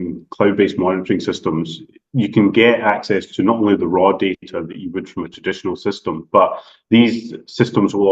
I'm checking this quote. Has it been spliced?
no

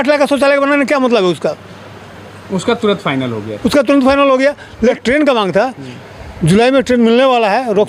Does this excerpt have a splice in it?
no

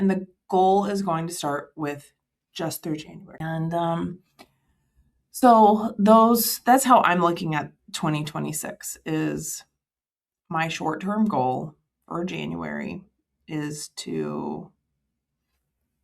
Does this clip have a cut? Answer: yes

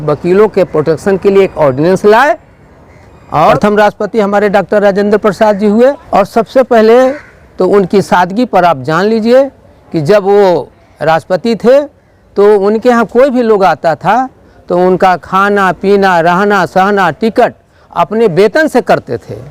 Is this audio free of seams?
no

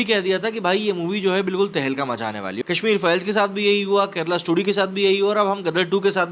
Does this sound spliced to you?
yes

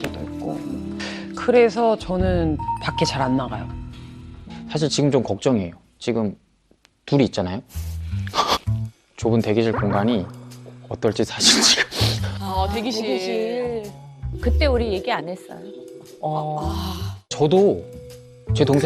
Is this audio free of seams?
no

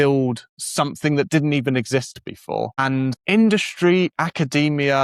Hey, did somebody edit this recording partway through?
no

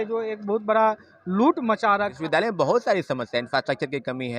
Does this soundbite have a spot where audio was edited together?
yes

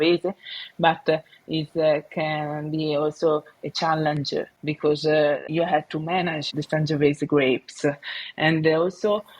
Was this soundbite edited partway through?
yes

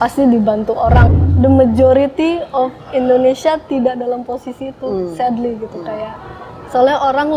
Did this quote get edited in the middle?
yes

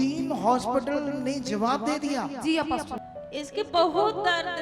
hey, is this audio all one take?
no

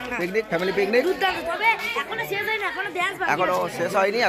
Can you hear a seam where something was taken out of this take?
no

